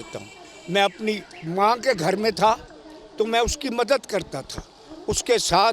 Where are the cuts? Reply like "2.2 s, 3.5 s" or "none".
none